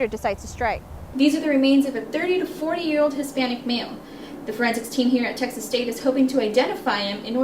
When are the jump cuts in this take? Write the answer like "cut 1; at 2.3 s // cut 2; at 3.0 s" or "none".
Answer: cut 1; at 1.0 s